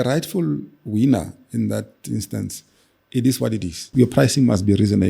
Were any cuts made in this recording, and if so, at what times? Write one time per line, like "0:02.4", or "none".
0:03.9

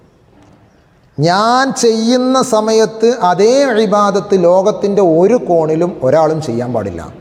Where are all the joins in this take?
none

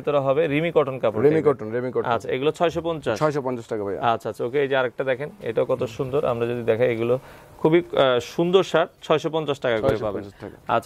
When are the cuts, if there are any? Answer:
none

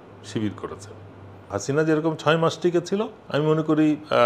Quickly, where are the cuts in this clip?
0:01.5
0:03.2

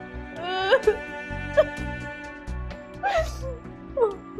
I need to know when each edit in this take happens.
none

